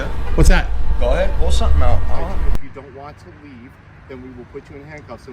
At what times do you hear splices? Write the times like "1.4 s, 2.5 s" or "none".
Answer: 2.5 s